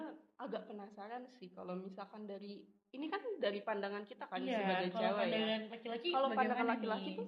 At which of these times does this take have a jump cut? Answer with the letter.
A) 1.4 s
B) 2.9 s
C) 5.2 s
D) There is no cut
D